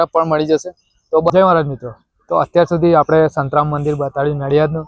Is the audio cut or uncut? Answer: cut